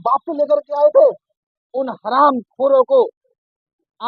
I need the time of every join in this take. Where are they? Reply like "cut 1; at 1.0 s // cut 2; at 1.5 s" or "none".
none